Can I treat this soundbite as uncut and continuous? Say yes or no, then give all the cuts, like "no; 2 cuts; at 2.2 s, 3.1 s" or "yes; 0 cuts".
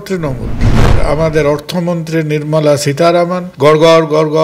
no; 2 cuts; at 0.9 s, 3.4 s